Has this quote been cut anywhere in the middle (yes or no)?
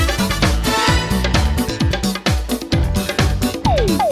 no